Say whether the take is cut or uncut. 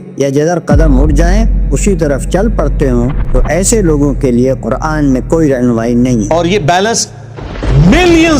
cut